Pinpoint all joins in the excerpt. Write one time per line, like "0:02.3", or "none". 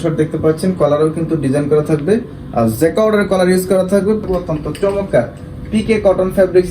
0:04.2